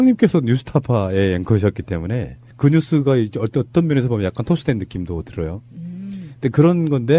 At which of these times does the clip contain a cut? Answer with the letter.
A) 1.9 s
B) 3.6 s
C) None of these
A